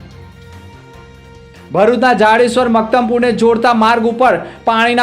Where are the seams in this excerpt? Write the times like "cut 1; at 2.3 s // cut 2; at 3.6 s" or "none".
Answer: cut 1; at 1.0 s